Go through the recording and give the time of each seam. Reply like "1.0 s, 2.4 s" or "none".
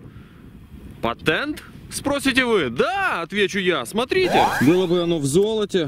4.5 s